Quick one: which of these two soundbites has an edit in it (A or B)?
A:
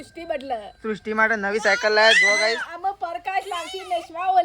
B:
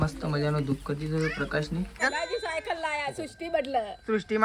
B